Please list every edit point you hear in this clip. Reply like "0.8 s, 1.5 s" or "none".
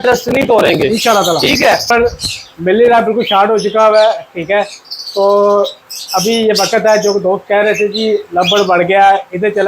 1.9 s